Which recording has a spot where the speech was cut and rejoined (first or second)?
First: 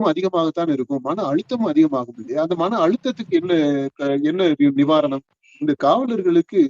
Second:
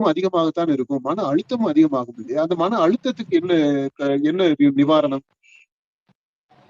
first